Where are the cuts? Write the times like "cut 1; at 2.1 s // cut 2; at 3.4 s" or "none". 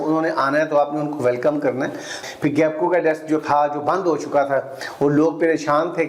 cut 1; at 2.2 s